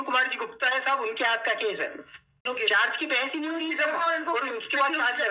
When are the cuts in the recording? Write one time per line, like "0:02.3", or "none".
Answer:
0:02.4